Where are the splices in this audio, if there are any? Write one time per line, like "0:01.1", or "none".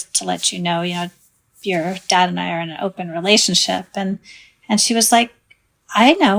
none